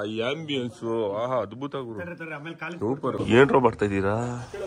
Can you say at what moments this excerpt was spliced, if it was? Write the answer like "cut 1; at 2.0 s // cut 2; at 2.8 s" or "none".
cut 1; at 3.2 s